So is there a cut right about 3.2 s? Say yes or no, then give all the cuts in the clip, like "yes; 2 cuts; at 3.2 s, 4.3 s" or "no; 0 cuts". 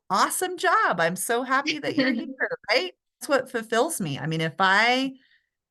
yes; 1 cut; at 3.2 s